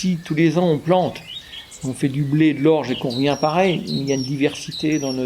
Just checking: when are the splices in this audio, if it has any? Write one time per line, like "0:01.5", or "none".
none